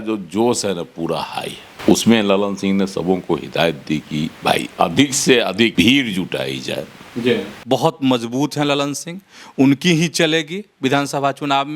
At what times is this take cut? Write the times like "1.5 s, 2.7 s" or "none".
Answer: 1.6 s, 5.7 s, 7.5 s

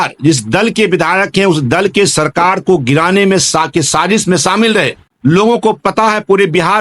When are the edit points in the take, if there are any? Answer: none

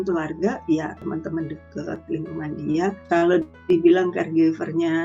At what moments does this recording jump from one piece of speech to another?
1.0 s, 3.0 s

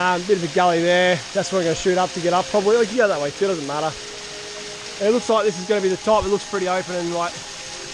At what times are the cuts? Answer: none

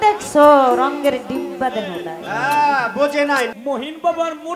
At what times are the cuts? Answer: 3.5 s

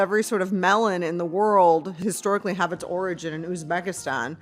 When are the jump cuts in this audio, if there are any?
1.9 s

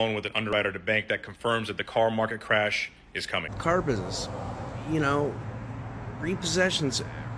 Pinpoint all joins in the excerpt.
3.5 s

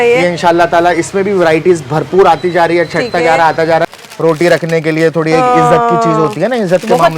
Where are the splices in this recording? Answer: 4.0 s

